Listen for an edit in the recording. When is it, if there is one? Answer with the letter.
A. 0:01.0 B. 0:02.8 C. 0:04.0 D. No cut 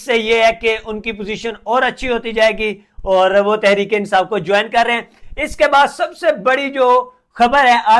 D